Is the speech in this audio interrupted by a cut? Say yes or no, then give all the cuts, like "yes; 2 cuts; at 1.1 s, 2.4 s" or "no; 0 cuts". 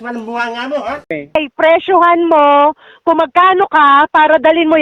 yes; 1 cut; at 1.4 s